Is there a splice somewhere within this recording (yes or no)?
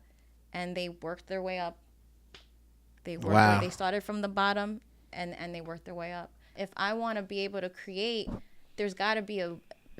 yes